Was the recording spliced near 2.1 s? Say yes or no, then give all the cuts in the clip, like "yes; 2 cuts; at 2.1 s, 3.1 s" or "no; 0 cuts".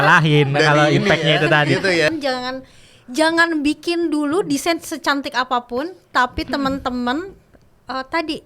yes; 1 cut; at 2.1 s